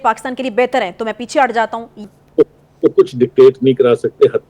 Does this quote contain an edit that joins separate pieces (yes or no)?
yes